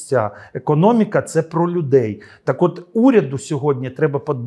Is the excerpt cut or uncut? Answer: uncut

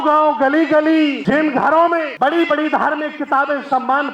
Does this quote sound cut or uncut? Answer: cut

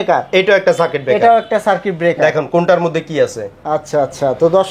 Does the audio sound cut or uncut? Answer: uncut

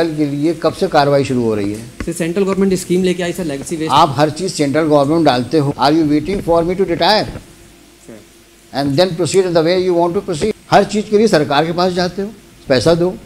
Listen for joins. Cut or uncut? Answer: cut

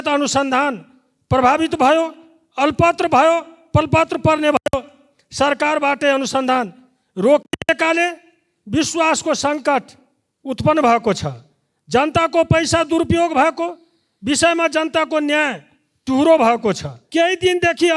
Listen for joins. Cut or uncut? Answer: cut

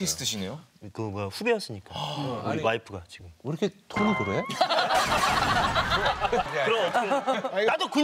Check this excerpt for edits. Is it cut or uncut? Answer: cut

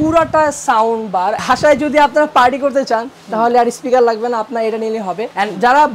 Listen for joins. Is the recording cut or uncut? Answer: cut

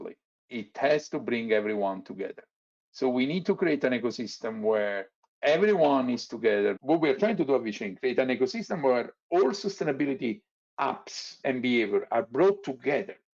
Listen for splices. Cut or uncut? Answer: cut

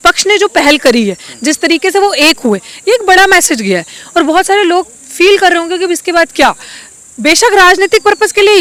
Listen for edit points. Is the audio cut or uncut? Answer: uncut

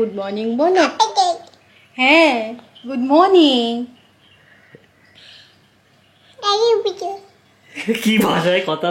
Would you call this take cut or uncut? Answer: uncut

